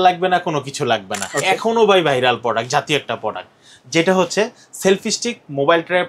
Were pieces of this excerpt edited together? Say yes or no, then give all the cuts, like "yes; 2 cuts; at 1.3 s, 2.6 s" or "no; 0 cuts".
yes; 1 cut; at 1.1 s